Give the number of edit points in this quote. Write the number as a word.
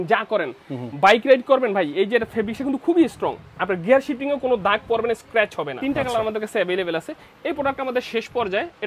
one